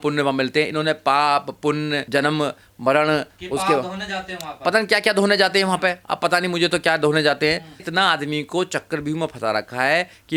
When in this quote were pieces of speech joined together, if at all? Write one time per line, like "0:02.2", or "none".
none